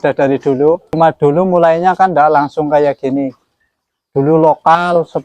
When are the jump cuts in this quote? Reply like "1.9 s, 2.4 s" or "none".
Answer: 1.0 s